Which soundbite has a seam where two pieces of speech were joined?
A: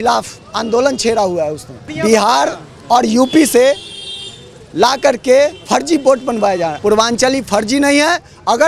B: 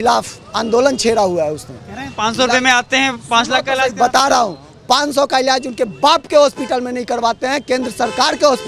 A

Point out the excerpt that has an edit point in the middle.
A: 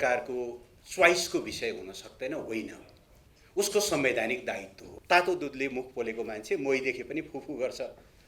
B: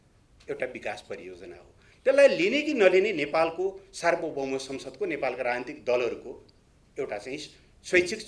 A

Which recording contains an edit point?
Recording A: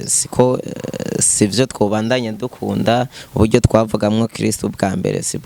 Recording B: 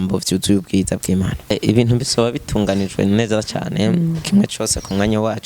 B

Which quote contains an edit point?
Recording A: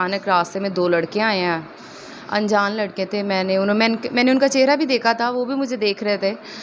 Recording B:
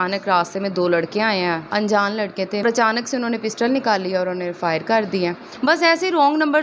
B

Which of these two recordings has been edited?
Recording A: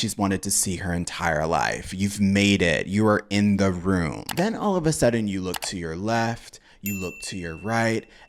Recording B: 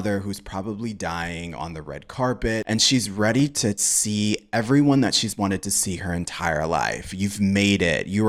B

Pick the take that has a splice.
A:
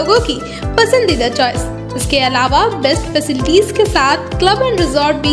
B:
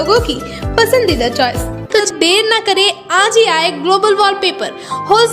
B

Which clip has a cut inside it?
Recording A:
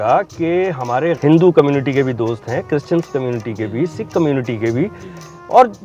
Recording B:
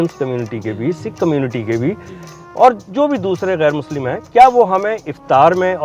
A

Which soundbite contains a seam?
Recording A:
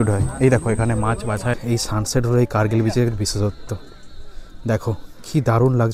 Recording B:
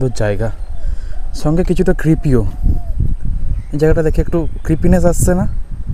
A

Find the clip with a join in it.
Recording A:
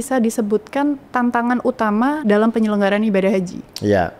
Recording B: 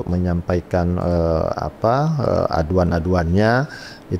A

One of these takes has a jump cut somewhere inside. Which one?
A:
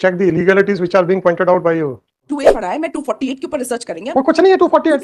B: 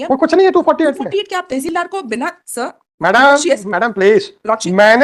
A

